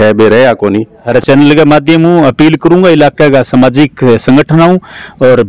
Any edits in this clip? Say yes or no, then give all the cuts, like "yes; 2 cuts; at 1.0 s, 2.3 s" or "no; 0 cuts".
yes; 1 cut; at 1.0 s